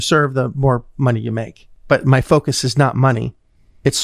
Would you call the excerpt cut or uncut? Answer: uncut